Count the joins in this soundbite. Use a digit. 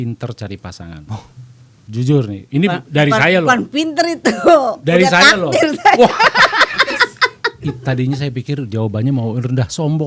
0